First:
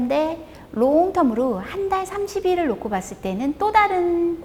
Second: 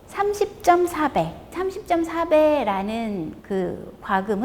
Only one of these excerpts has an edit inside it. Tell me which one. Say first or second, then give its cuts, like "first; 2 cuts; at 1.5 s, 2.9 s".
second; 1 cut; at 1.5 s